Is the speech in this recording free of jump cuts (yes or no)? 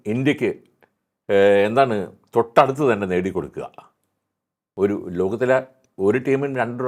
yes